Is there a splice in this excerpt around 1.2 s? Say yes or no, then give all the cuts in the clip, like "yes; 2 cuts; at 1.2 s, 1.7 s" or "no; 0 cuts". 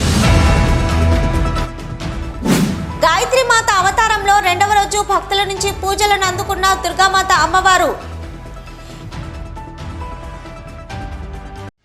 no; 1 cut; at 2.6 s